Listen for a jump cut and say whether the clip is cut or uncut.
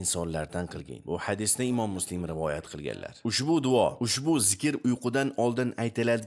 uncut